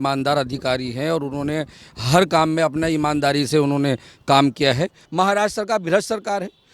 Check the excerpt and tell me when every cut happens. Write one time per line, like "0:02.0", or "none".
0:05.0